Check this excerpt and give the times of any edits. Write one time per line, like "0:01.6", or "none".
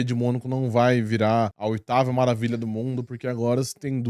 0:01.6